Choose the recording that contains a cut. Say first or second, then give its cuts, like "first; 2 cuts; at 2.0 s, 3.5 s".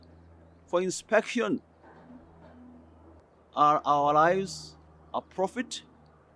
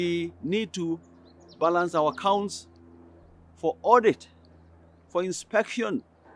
first; 1 cut; at 3.2 s